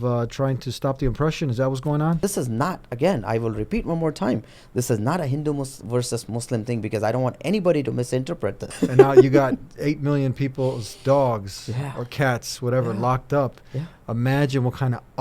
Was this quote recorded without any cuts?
no; 2 cuts; at 2.2 s, 8.6 s

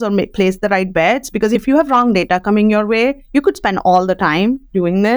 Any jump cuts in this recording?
yes; 1 cut; at 1.6 s

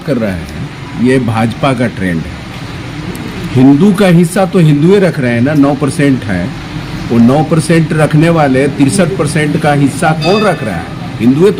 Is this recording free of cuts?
yes; 0 cuts

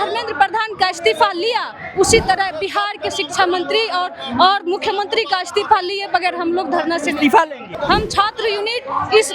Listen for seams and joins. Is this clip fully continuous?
no; 1 cut; at 7.6 s

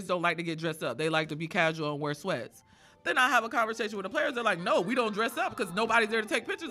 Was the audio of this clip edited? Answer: no; 0 cuts

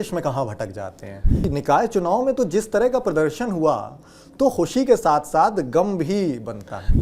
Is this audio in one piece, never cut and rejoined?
no; 1 cut; at 1.4 s

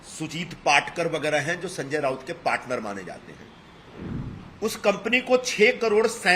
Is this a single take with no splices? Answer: no; 1 cut; at 3.8 s

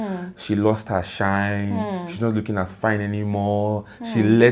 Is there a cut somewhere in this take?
no; 0 cuts

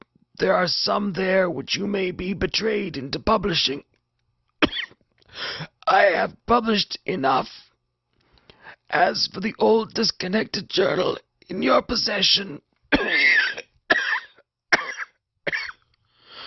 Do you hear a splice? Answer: no; 0 cuts

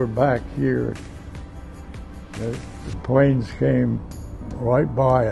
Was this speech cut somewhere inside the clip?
no; 0 cuts

